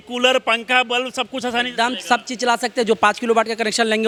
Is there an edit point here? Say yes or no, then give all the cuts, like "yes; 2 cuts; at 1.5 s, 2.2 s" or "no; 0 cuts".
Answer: no; 0 cuts